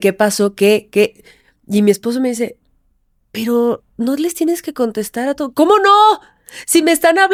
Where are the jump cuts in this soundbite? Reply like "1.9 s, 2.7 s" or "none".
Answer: none